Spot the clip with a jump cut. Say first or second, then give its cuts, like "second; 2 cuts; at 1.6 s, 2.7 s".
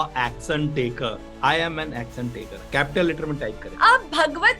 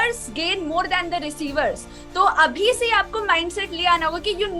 first; 2 cuts; at 1.2 s, 3.6 s